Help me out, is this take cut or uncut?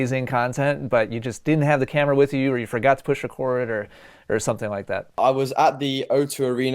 cut